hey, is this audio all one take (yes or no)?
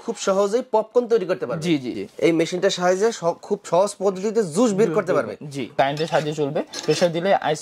no